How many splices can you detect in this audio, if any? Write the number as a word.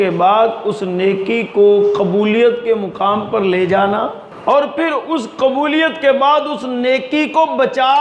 one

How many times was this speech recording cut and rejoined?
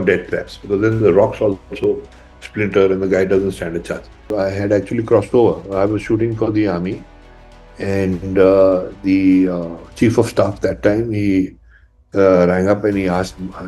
one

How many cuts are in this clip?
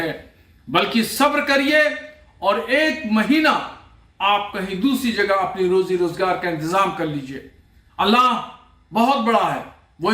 one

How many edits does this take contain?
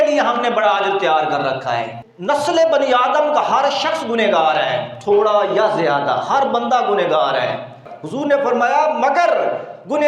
two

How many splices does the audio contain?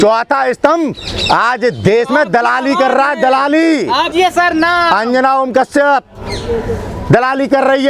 one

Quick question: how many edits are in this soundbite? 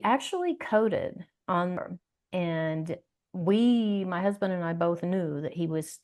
one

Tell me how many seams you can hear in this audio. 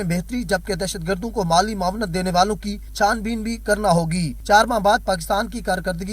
three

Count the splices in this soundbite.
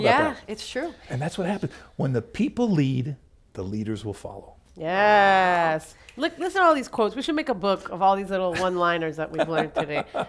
zero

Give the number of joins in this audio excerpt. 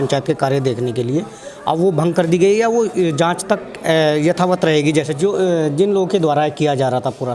one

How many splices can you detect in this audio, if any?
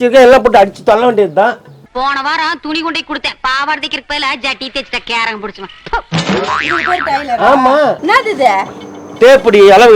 one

